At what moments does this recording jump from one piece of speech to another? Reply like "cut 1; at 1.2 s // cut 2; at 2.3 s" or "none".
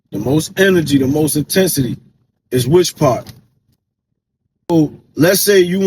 cut 1; at 4.7 s